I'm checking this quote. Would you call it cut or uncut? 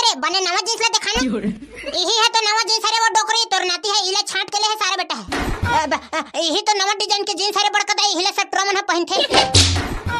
cut